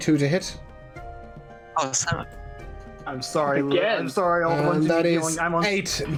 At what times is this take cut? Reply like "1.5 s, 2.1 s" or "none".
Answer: none